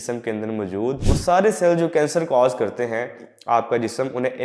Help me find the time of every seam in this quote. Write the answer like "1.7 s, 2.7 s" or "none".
1.0 s